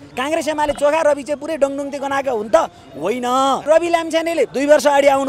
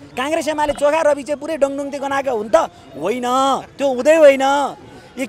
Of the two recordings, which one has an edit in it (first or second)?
first